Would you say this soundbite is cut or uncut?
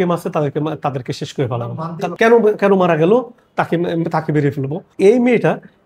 cut